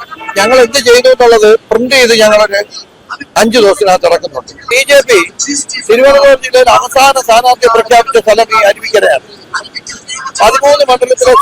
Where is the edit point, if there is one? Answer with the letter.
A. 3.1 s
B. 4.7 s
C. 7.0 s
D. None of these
B